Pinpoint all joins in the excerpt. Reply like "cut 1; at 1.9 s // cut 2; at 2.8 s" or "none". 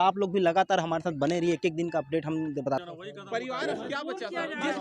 cut 1; at 2.8 s